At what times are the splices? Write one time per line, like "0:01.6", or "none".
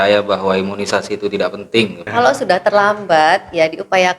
0:02.0